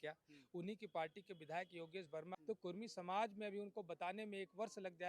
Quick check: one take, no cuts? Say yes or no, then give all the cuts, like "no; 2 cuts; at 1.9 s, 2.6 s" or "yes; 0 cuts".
no; 1 cut; at 2.3 s